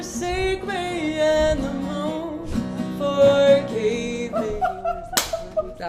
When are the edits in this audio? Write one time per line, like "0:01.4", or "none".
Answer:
none